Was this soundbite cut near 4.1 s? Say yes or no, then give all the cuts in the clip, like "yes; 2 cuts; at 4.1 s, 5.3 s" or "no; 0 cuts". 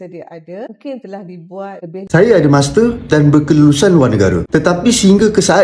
no; 1 cut; at 2.1 s